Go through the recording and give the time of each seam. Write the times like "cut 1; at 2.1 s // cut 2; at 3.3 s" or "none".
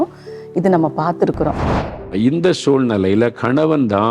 cut 1; at 2.0 s